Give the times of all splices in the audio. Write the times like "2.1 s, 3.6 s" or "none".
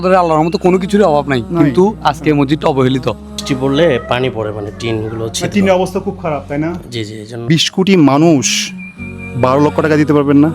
3.3 s, 7.4 s